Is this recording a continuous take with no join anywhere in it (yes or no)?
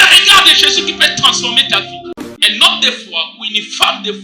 no